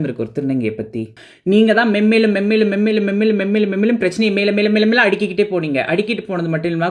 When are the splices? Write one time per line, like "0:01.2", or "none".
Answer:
0:01.2